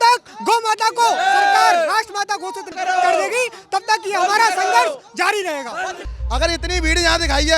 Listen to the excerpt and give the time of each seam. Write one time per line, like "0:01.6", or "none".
0:02.7
0:06.1

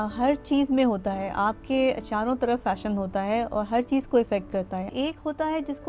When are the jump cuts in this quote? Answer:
0:04.9

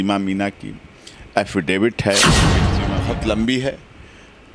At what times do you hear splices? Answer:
0:02.6

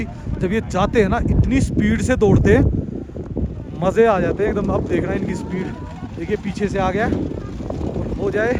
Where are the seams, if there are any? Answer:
none

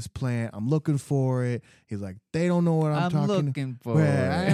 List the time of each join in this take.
none

